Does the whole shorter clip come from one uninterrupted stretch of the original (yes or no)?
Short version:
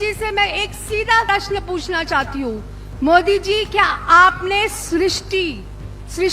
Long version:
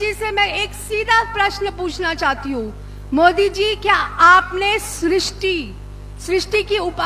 no